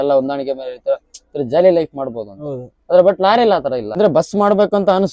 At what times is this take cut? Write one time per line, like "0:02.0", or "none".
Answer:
0:03.9